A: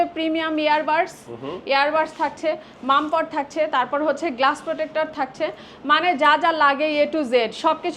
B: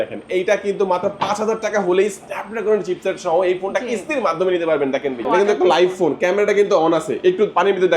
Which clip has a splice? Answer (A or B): B